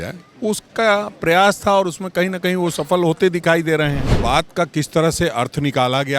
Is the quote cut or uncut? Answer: cut